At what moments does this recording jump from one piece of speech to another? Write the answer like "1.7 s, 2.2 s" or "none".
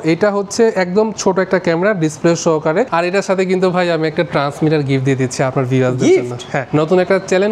2.9 s, 6.6 s